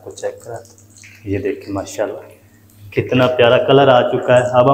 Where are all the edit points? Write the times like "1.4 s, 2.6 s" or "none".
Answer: none